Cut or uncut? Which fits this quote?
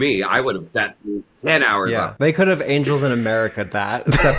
cut